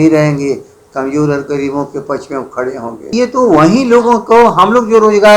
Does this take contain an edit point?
yes; 1 cut; at 3.1 s

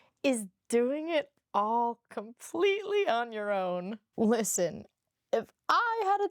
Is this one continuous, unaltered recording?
no; 1 cut; at 4.0 s

